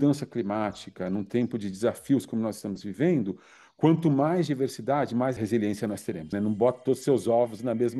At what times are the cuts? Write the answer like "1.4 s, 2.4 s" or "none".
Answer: 5.4 s, 6.3 s